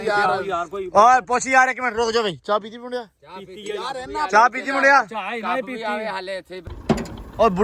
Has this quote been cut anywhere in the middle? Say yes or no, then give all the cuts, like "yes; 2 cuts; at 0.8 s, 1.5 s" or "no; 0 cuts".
yes; 1 cut; at 6.6 s